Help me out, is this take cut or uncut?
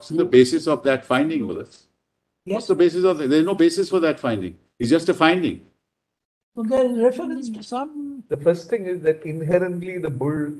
cut